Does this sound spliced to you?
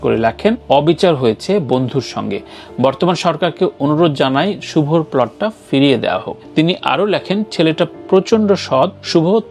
no; 0 cuts

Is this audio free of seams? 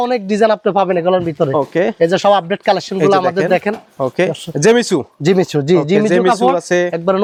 yes; 0 cuts

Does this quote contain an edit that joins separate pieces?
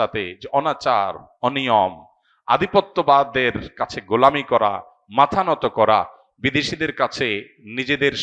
no; 0 cuts

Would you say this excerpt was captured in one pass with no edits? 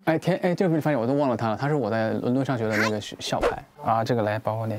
yes; 0 cuts

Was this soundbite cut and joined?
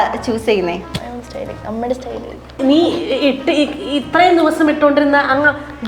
yes; 2 cuts; at 0.8 s, 2.6 s

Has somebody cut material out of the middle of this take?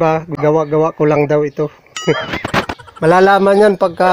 yes; 2 cuts; at 1.9 s, 2.7 s

